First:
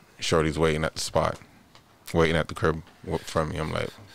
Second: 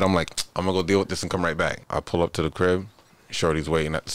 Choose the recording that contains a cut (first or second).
second